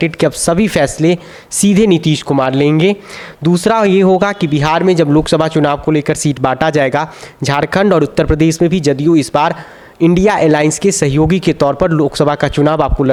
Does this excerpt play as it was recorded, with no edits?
yes; 0 cuts

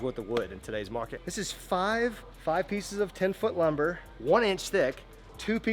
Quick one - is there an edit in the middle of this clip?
no; 0 cuts

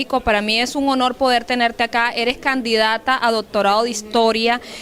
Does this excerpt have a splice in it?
no; 0 cuts

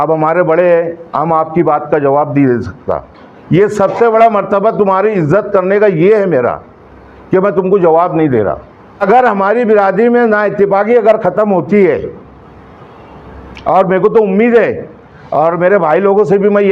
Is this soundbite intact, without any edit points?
no; 1 cut; at 9.0 s

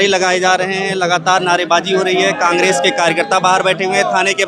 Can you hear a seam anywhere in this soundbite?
no; 0 cuts

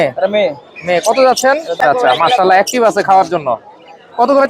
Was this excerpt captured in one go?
no; 1 cut; at 1.8 s

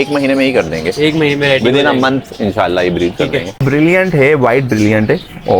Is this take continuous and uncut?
no; 1 cut; at 3.6 s

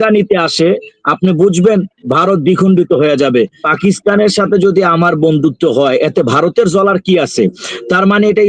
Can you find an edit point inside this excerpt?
yes; 1 cut; at 3.6 s

